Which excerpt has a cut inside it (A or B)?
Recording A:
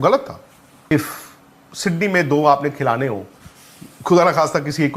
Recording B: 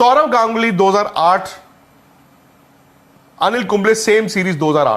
A